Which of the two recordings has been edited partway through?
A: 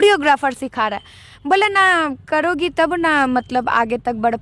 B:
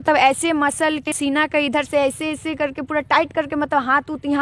B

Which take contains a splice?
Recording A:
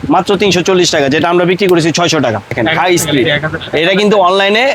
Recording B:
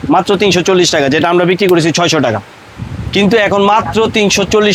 A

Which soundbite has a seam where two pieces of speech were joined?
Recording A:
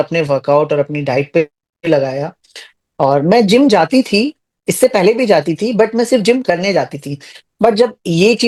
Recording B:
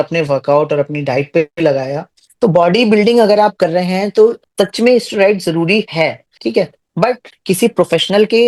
B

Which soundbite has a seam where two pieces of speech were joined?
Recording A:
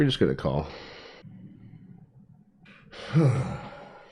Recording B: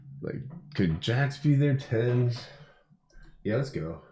A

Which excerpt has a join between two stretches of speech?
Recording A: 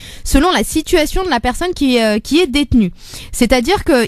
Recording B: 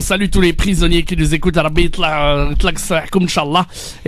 B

